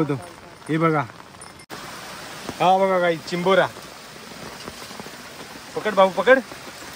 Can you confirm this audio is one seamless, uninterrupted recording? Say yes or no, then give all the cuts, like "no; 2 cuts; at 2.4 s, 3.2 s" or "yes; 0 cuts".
no; 1 cut; at 1.6 s